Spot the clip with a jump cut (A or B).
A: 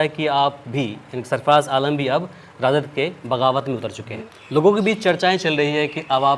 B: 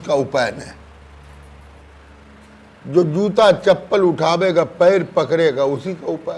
A